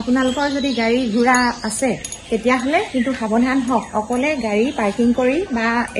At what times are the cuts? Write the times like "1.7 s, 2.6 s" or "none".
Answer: none